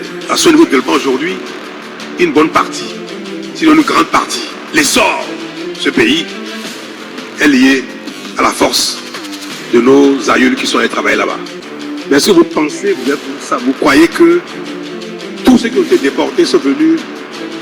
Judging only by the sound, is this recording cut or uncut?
uncut